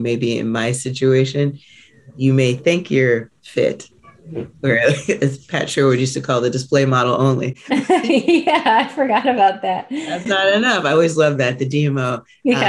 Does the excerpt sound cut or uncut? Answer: uncut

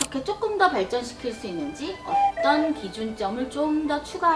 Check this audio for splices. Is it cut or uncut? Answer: uncut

